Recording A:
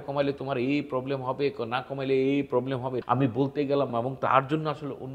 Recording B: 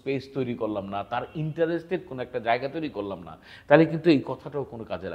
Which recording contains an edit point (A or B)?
A